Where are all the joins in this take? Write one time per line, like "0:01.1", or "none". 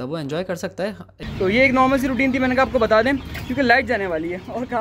0:01.2